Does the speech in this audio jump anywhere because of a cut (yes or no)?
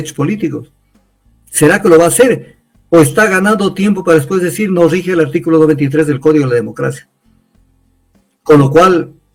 no